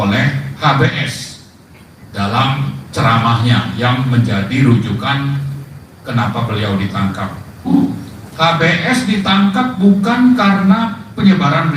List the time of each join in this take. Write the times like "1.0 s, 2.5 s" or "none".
7.7 s